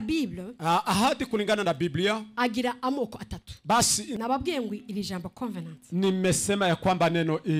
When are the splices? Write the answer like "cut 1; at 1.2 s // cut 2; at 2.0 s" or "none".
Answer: cut 1; at 4.2 s